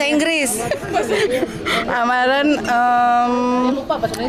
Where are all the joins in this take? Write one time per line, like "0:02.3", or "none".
none